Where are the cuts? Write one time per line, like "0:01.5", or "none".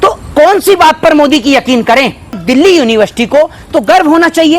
0:02.4